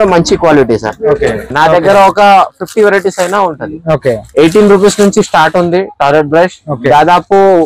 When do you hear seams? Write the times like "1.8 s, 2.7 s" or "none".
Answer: 1.5 s